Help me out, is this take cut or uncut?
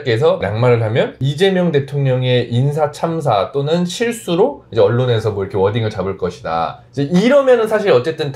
uncut